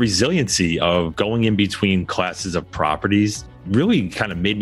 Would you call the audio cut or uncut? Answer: uncut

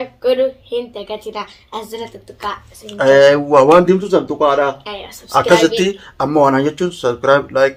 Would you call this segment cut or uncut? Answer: uncut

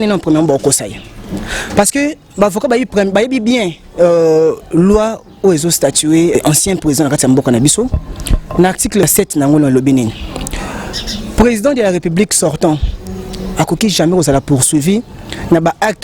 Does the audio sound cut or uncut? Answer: cut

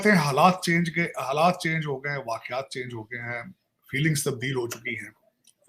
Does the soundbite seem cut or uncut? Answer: uncut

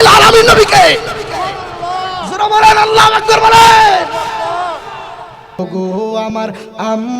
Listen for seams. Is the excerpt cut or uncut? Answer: cut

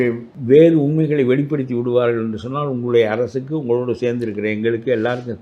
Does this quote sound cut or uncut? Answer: uncut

